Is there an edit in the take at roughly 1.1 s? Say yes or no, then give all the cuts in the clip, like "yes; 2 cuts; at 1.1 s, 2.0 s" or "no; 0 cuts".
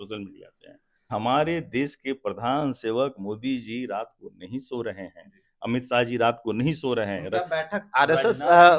yes; 1 cut; at 1.1 s